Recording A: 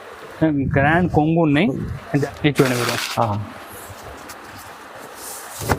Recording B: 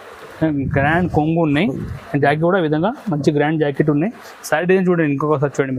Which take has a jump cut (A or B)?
A